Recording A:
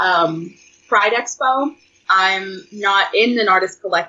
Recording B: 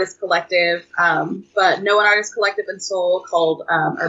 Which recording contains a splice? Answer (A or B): A